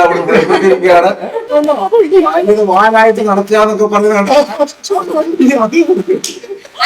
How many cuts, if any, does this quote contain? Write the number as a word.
one